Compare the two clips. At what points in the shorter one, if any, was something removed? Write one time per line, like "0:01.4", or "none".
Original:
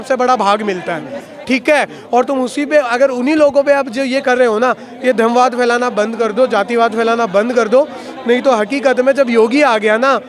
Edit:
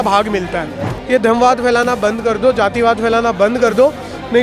0:00.9